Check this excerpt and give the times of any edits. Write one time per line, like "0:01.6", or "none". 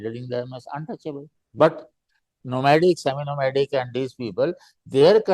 0:01.4